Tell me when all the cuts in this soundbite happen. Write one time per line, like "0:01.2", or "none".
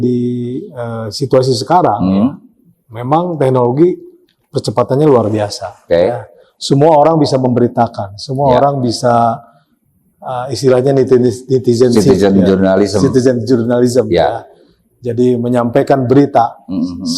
none